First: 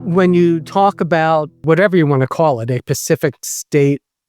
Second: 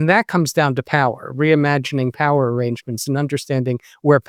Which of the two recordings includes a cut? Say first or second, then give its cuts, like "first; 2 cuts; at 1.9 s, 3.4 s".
first; 1 cut; at 1.6 s